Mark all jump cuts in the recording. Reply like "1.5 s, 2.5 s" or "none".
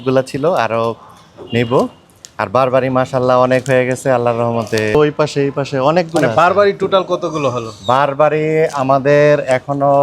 4.9 s